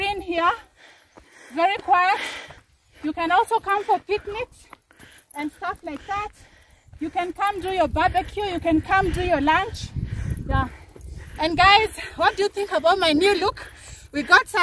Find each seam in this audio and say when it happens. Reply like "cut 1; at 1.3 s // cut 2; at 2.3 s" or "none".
none